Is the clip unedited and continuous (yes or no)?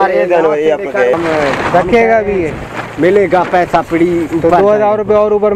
no